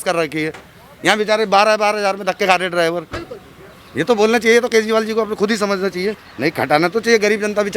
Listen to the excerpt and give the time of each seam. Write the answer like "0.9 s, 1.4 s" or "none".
6.2 s